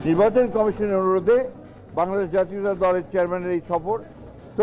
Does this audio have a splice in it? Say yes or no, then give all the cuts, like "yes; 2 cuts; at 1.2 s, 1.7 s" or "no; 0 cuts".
no; 0 cuts